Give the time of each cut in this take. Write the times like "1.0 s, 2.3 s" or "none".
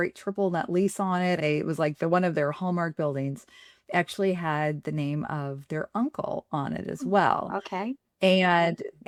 none